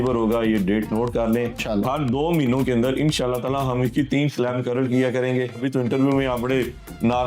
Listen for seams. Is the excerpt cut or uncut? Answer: cut